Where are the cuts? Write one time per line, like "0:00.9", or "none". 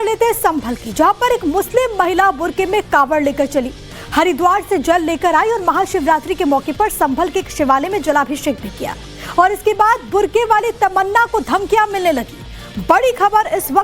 0:06.7